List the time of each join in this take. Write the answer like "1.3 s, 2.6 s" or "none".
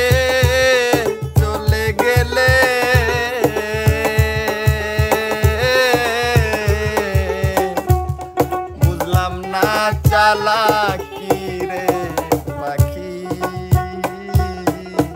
none